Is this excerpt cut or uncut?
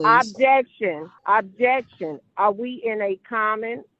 cut